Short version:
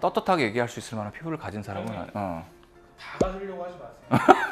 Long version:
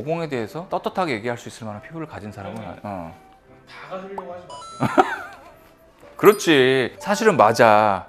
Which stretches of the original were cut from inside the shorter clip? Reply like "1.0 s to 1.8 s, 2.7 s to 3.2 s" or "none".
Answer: none